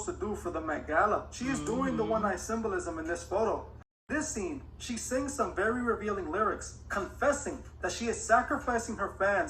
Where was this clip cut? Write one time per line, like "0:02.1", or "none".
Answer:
0:03.9